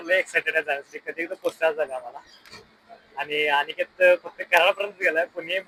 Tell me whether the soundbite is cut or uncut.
uncut